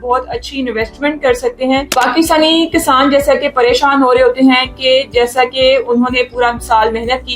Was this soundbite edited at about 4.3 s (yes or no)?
no